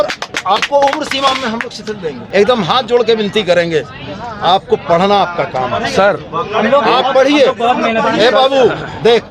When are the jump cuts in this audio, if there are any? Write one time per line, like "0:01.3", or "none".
0:02.2

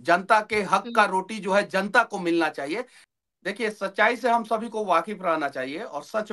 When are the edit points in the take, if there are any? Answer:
0:03.0

